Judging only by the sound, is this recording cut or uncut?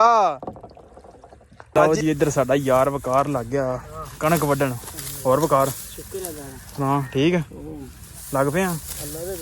cut